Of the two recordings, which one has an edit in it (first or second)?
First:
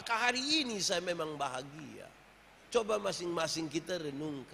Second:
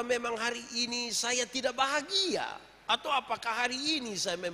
first